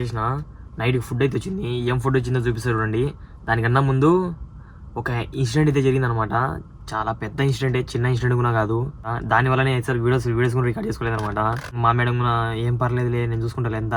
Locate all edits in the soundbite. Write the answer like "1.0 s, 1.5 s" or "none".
9.1 s, 11.7 s